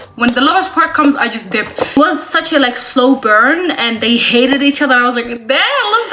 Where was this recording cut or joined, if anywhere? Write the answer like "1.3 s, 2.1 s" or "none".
none